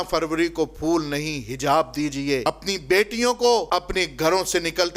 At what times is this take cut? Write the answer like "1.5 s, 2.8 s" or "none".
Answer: 2.4 s, 3.7 s